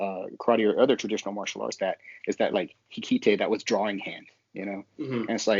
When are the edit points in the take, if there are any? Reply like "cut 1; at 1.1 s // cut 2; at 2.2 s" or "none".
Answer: cut 1; at 1.8 s